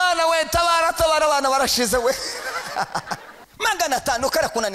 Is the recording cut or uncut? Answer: cut